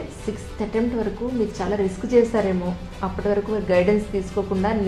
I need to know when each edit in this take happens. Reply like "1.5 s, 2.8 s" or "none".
none

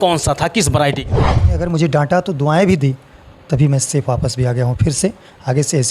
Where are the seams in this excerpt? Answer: 1.3 s

